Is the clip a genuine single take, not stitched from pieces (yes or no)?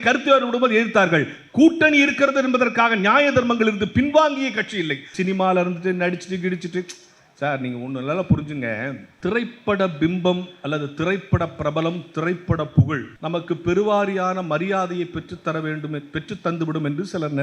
no